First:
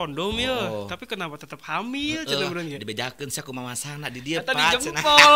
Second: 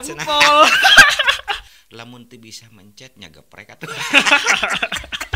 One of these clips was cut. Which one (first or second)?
second